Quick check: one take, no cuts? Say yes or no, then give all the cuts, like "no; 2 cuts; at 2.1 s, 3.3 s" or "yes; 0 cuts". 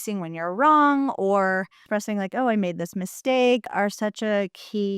no; 2 cuts; at 1.8 s, 3.7 s